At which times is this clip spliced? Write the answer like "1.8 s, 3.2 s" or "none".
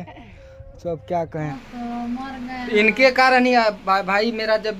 1.6 s